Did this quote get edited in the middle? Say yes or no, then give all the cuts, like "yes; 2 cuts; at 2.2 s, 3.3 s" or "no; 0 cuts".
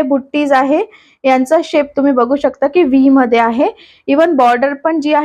no; 0 cuts